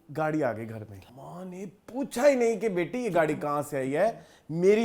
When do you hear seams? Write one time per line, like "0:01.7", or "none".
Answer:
0:01.0